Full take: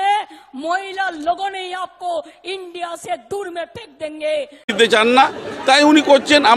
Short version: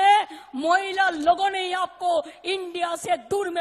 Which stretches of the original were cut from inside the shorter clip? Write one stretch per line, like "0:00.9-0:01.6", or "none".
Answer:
none